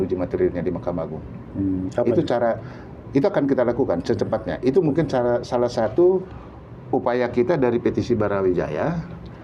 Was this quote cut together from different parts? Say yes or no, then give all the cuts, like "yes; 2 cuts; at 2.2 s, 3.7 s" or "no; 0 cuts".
no; 0 cuts